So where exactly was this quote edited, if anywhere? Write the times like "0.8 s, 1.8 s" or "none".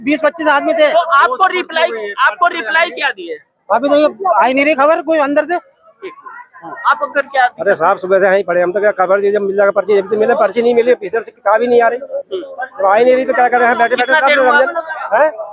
none